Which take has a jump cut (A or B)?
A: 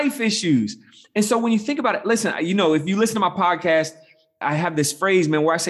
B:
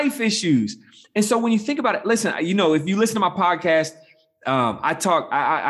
A